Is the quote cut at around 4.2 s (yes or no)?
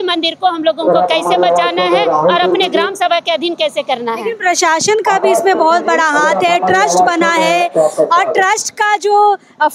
no